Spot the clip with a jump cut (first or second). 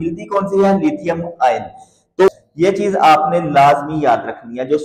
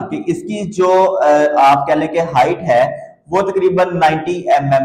first